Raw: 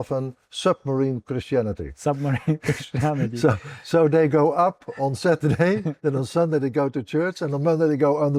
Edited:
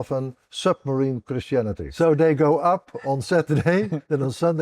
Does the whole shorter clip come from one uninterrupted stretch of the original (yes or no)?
no